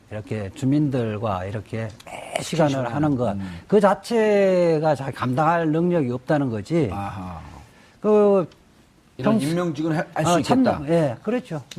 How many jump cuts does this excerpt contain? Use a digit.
0